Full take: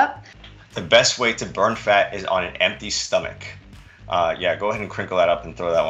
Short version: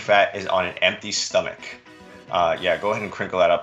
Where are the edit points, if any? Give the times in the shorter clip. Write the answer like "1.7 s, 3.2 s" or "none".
none